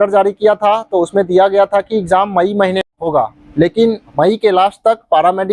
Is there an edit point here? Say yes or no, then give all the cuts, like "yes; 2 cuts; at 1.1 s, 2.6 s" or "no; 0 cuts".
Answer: yes; 2 cuts; at 2.8 s, 4.0 s